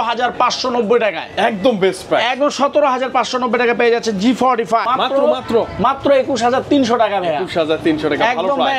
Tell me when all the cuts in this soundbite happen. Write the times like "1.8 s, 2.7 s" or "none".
4.9 s